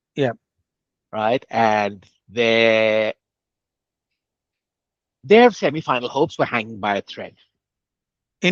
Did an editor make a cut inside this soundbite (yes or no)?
no